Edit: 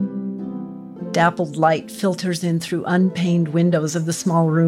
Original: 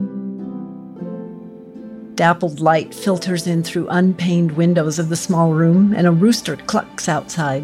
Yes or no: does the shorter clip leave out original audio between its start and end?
yes